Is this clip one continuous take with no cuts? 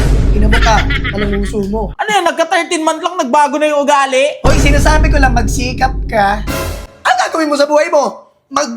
no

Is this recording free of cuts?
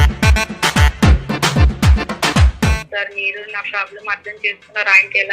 no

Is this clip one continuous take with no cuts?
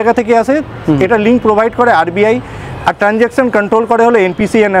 yes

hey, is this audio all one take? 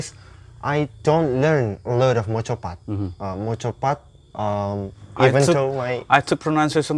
no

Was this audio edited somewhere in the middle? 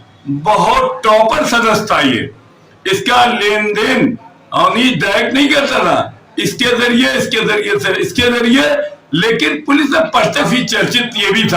yes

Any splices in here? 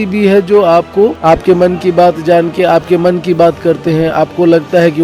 yes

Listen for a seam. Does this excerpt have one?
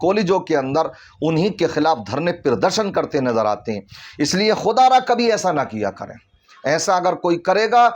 no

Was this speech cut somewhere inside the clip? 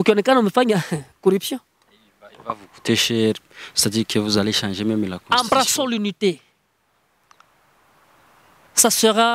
yes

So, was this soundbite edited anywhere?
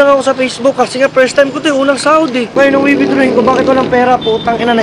yes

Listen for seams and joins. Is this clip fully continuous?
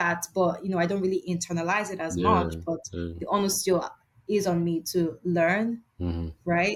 yes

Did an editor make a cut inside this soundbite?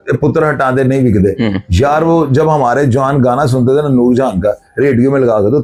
no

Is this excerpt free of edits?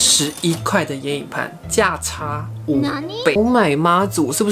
no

